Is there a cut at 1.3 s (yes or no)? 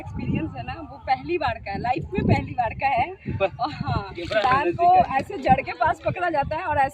no